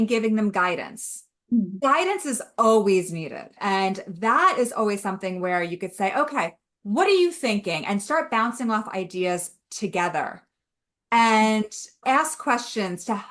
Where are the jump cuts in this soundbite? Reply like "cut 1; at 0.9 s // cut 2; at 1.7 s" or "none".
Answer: cut 1; at 1.7 s // cut 2; at 3.5 s